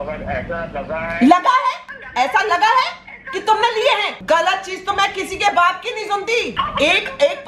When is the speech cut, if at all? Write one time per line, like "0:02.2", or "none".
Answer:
0:04.2
0:06.5